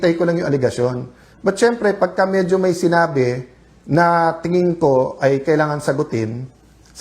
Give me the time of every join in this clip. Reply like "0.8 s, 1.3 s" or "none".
1.0 s

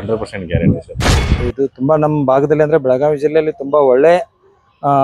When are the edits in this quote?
1.3 s

